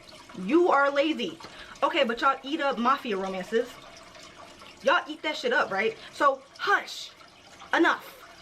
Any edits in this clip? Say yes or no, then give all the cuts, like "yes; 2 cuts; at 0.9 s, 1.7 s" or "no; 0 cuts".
yes; 2 cuts; at 1.6 s, 6.0 s